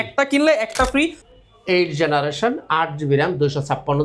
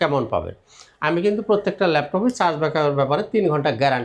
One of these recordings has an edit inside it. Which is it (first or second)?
first